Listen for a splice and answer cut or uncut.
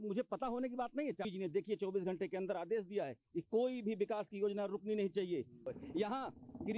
cut